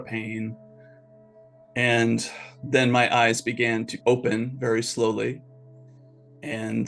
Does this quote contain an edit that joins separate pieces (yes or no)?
yes